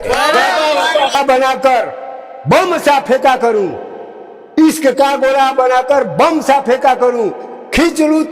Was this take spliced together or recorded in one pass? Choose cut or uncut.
cut